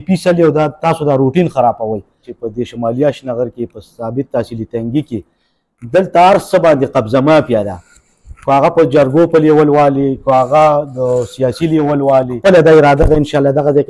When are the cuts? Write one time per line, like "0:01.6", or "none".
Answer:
0:02.3
0:12.4